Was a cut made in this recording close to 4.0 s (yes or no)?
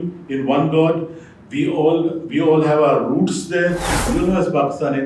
yes